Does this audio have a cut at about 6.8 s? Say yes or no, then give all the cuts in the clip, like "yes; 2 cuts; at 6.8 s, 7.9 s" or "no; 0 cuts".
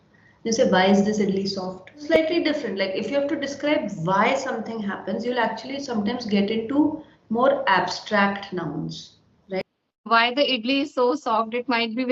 no; 2 cuts; at 2.0 s, 9.6 s